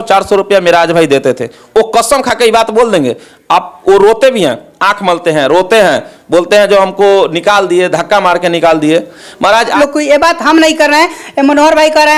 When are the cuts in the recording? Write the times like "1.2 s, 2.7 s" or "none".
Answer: 9.7 s